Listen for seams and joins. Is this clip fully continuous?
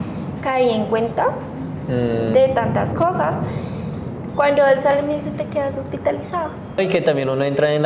no; 1 cut; at 6.8 s

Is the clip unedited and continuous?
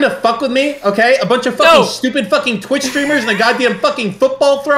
yes; 0 cuts

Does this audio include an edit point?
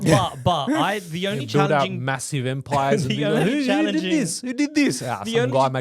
no; 0 cuts

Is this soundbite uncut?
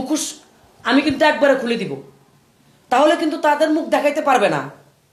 yes; 0 cuts

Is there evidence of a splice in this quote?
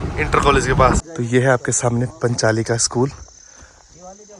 yes; 1 cut; at 1.0 s

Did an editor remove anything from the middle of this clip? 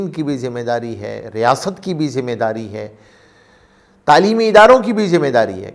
no; 0 cuts

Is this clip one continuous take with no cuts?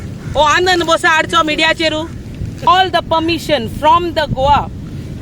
no; 1 cut; at 2.7 s

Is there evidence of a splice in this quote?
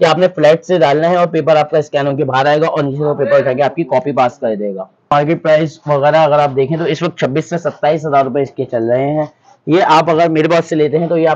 yes; 1 cut; at 5.1 s

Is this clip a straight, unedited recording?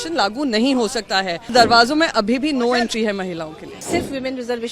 no; 2 cuts; at 1.5 s, 3.8 s

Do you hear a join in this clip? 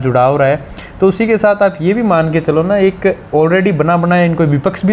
no; 0 cuts

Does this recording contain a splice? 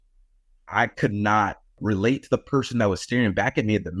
yes; 1 cut; at 1.8 s

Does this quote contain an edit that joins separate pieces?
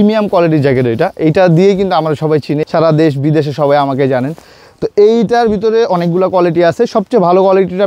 no; 0 cuts

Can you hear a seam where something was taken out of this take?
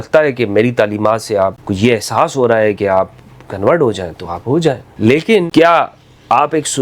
yes; 3 cuts; at 1.6 s, 4.9 s, 5.5 s

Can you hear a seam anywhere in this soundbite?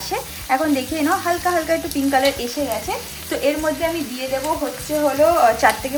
no; 0 cuts

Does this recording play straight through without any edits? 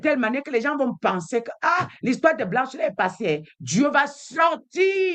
yes; 0 cuts

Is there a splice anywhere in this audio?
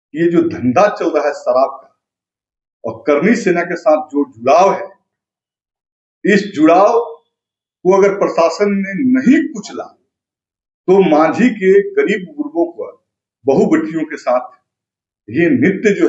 no; 0 cuts

